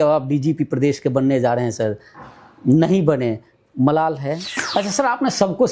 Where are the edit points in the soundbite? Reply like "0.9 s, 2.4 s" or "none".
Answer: 4.5 s